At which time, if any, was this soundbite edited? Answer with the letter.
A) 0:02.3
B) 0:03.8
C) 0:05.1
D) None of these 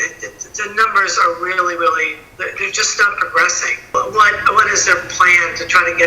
B